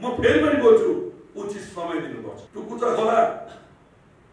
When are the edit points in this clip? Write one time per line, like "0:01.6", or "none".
0:02.4

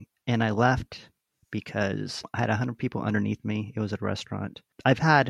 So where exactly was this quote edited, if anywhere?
none

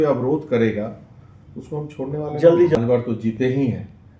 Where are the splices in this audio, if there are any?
0:02.8

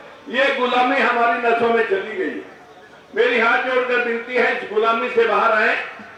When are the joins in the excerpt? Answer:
none

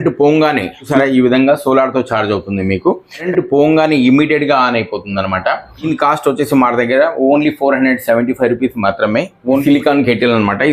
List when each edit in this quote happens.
0:00.9
0:03.3
0:05.9
0:09.6

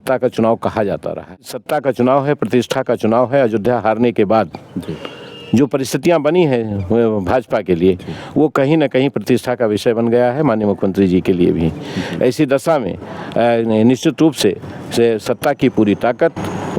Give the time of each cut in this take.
0:01.5

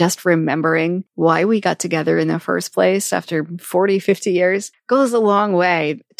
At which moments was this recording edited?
0:01.1
0:04.7

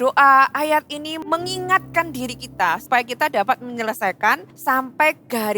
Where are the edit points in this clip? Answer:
0:01.1
0:02.8
0:04.5

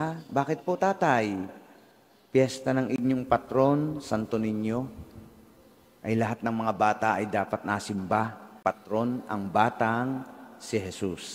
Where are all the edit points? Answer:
0:08.6

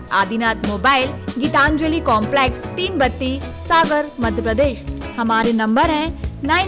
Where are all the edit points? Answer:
none

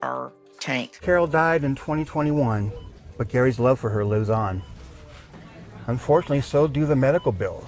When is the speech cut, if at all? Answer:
0:00.9

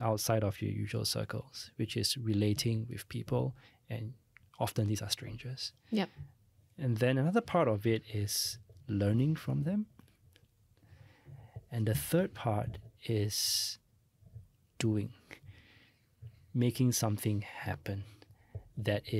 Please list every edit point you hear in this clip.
none

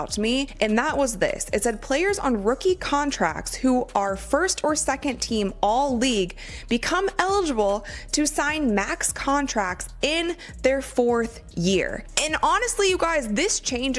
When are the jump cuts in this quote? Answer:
none

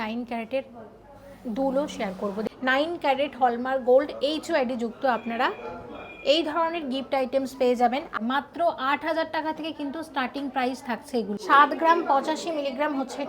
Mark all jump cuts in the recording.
0:02.5
0:08.1
0:11.4

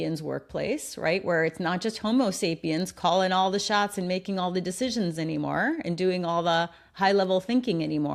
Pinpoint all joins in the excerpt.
none

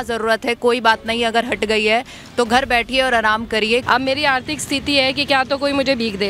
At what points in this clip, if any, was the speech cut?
0:03.8

